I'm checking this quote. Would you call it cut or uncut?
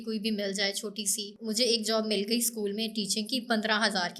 uncut